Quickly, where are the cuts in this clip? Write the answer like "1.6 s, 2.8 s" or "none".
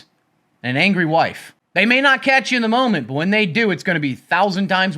none